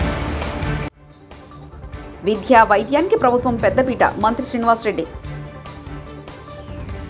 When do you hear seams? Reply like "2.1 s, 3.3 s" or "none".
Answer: none